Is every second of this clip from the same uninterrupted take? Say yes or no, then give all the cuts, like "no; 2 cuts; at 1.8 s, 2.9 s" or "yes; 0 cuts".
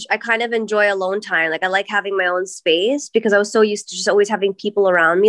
yes; 0 cuts